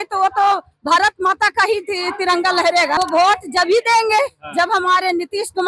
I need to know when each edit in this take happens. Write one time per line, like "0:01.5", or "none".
0:03.0